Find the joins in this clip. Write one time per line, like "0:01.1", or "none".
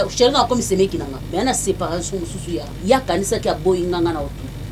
0:01.2
0:02.7